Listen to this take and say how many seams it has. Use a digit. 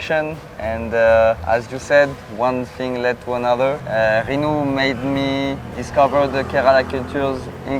2